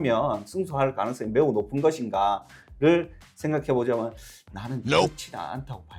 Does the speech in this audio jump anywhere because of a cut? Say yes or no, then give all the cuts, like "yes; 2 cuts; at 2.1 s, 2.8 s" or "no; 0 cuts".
no; 0 cuts